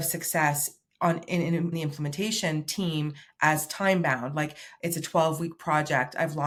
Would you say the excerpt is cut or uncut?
uncut